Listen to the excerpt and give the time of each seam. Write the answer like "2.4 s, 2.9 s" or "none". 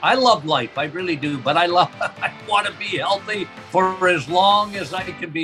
none

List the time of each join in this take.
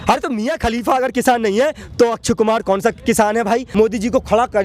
3.7 s

